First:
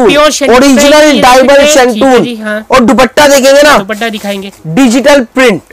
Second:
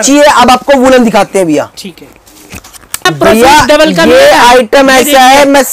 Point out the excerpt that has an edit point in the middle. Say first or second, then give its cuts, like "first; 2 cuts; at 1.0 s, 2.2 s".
second; 1 cut; at 3.0 s